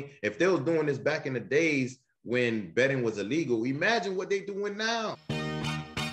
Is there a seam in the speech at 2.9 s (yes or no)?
no